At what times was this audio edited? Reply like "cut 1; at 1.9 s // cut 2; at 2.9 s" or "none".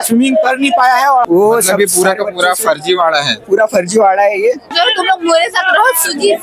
cut 1; at 1.2 s // cut 2; at 4.7 s